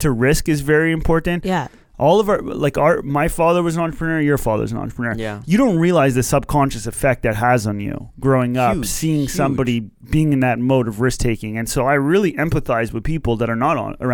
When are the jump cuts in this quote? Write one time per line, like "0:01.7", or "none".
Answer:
0:01.8